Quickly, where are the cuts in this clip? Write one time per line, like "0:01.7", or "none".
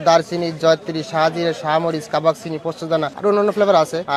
none